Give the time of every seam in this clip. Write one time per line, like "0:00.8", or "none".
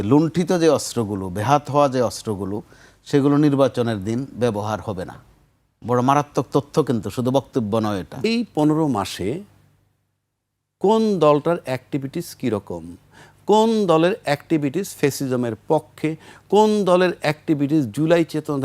0:08.2